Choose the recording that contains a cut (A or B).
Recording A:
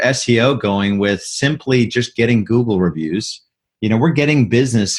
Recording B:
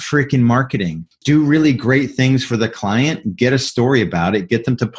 B